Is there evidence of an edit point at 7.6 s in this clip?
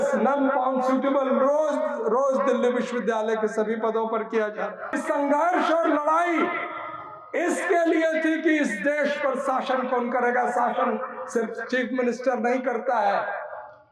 no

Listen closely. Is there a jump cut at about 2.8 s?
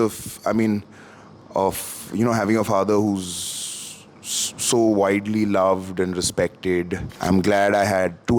no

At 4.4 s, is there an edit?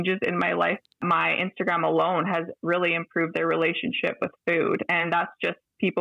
no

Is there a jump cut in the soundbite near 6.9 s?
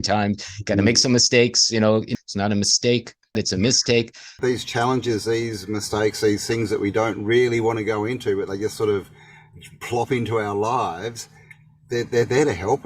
no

